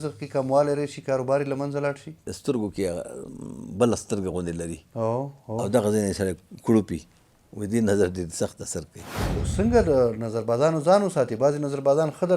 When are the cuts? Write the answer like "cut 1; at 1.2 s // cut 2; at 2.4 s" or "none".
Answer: cut 1; at 2.2 s // cut 2; at 9.2 s